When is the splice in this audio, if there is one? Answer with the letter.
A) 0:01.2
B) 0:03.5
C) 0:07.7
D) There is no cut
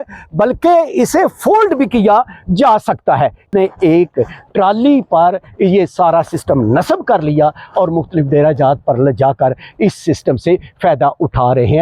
B